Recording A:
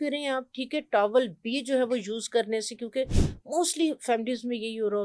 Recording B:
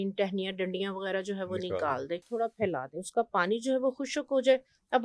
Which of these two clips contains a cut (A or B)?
B